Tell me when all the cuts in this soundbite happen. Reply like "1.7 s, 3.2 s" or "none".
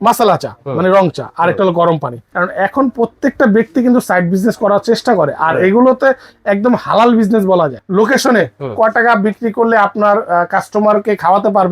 2.3 s, 7.8 s